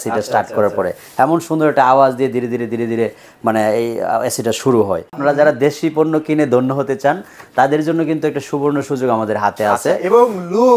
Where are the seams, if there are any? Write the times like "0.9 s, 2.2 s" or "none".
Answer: 5.2 s